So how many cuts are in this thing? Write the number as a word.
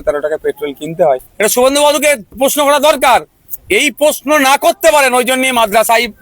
one